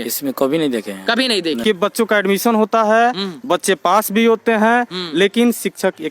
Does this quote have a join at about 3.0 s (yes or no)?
no